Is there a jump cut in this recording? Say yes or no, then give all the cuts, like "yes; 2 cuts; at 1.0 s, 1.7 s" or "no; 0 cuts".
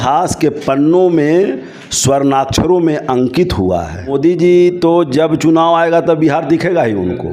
yes; 1 cut; at 4.1 s